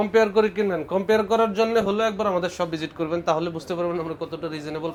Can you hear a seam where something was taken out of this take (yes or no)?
no